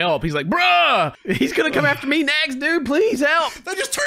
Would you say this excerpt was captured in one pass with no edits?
no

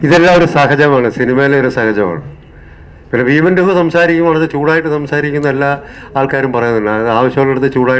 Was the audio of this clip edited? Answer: no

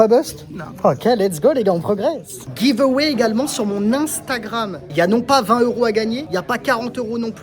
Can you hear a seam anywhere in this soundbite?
yes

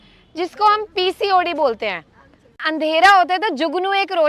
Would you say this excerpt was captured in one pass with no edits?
no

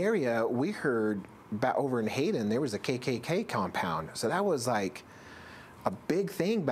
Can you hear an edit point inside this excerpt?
no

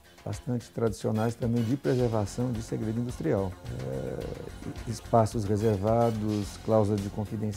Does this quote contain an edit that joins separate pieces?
no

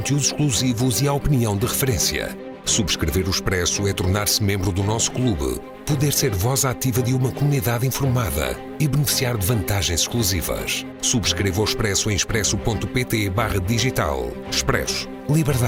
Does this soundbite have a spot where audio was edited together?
no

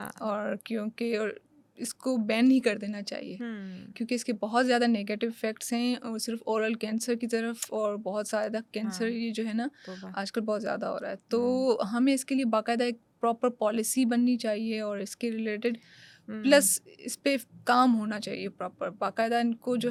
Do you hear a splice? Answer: no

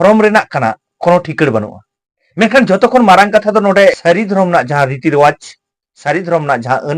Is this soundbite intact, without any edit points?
no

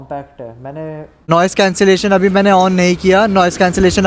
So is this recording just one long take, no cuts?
no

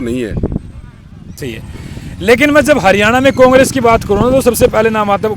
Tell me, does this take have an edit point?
yes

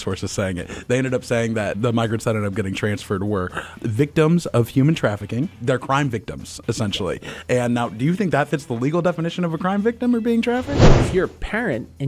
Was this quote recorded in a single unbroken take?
no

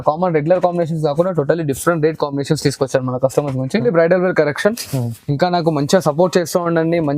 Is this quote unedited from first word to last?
no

